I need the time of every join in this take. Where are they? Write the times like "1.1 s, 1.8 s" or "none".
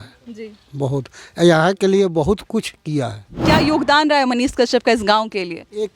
3.4 s